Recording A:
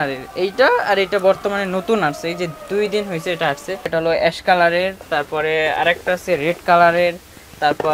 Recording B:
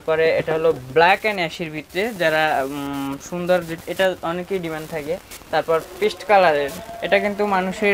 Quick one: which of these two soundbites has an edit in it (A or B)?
A